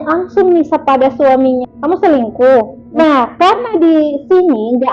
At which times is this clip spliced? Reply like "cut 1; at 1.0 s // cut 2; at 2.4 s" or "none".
cut 1; at 1.6 s // cut 2; at 3.0 s